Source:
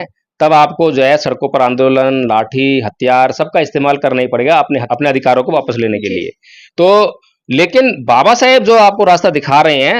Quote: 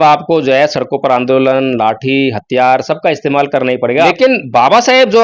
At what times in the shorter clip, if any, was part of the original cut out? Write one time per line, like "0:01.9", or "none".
0:04.1